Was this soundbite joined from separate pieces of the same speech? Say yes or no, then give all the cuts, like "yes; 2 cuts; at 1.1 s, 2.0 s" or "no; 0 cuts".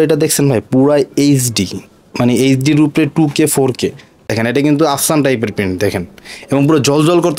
yes; 1 cut; at 4.3 s